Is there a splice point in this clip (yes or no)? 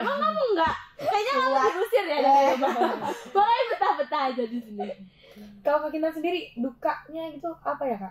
no